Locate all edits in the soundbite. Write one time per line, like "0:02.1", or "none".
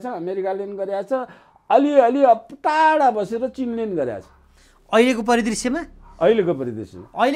none